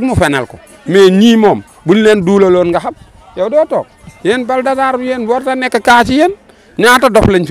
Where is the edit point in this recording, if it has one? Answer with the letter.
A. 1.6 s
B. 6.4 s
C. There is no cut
C